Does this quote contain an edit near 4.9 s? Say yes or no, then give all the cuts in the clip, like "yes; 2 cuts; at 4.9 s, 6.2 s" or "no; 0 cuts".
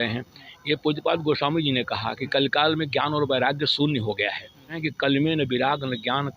yes; 1 cut; at 4.9 s